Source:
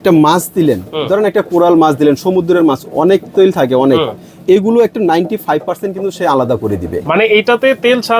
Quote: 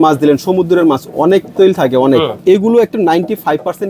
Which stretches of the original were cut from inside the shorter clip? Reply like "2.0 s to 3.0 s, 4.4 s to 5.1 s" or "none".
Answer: 4.1 s to 4.4 s